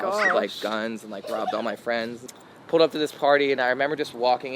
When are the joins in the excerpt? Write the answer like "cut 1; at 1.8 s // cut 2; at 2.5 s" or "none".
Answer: cut 1; at 2.2 s